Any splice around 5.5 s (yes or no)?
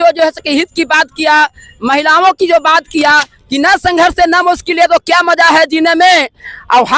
no